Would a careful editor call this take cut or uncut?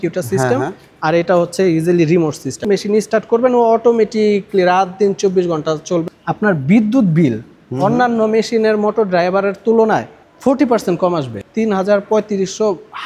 cut